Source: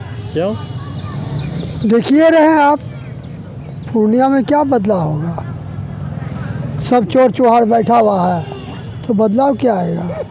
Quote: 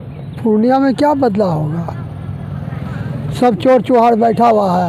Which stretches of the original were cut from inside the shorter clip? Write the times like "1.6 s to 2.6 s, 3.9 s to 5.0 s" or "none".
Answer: none

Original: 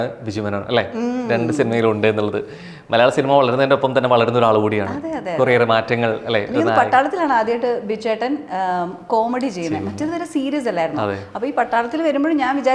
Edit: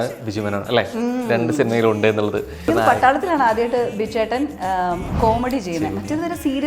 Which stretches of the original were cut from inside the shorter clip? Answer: 2.6 s to 6.5 s

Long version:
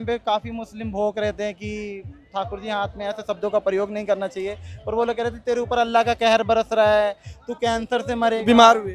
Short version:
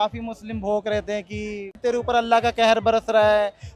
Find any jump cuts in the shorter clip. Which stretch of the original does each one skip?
2.1 s to 5.4 s

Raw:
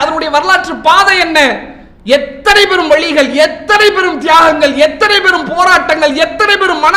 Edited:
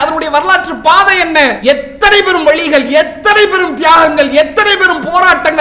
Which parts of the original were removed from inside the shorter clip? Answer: 1.6 s to 2.0 s

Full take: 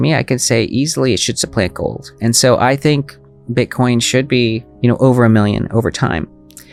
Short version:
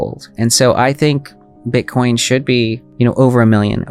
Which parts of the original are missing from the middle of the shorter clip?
none

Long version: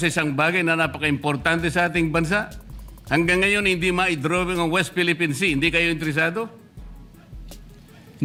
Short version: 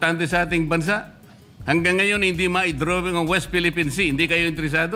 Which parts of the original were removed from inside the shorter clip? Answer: none

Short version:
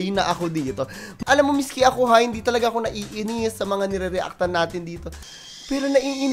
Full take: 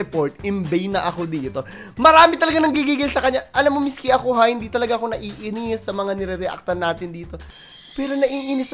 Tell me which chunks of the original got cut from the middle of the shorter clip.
1.9 s to 3.4 s

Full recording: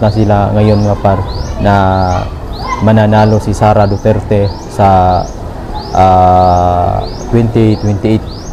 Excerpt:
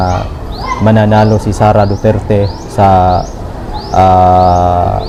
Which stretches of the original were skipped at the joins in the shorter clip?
none

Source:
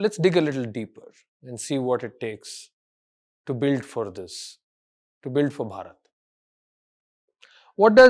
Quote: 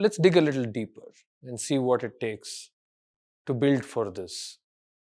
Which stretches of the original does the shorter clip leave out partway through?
none

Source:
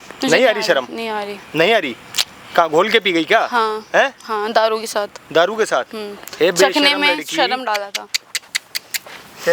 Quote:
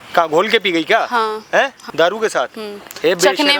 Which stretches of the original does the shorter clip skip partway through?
4.2 s to 5.2 s

